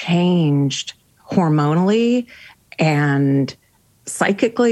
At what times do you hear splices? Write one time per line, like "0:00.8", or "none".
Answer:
none